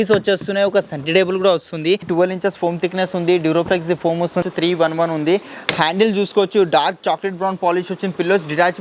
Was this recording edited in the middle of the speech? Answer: yes; 2 cuts; at 2.1 s, 4.4 s

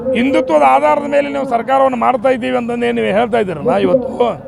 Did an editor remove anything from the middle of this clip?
no; 0 cuts

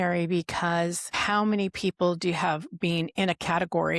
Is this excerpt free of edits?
no; 1 cut; at 1.2 s

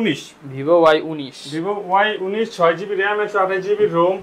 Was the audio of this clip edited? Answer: no; 0 cuts

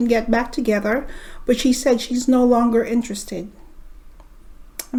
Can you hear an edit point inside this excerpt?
no; 0 cuts

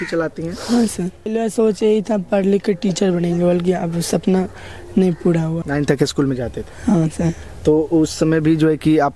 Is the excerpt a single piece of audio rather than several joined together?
no; 2 cuts; at 1.3 s, 5.6 s

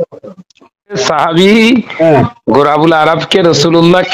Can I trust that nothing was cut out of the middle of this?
no; 1 cut; at 1.0 s

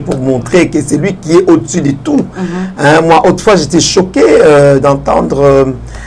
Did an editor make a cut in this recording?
no; 0 cuts

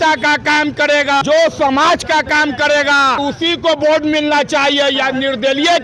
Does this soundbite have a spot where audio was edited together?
yes; 2 cuts; at 1.2 s, 3.2 s

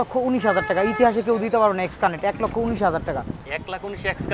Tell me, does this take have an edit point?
no; 0 cuts

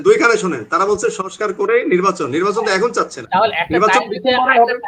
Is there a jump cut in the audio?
no; 0 cuts

